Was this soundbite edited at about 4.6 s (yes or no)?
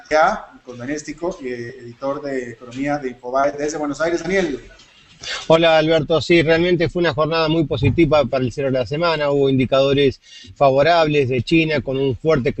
yes